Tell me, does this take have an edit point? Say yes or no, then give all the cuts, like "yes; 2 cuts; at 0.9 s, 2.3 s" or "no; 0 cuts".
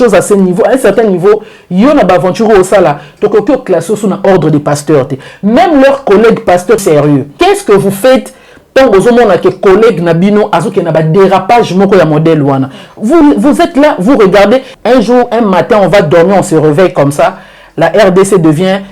yes; 2 cuts; at 6.8 s, 14.7 s